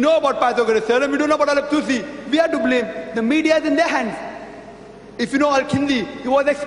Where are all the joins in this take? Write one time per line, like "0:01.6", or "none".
0:02.4